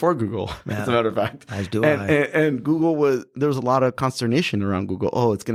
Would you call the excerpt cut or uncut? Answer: uncut